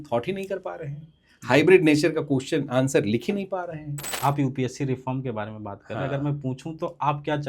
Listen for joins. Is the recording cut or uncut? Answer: cut